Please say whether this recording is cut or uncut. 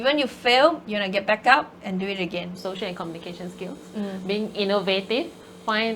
cut